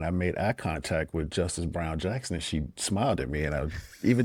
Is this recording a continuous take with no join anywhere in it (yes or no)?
yes